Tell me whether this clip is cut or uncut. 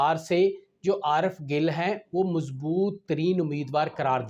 uncut